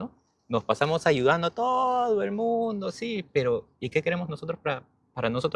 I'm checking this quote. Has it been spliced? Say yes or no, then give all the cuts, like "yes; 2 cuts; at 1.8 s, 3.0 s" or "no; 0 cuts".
no; 0 cuts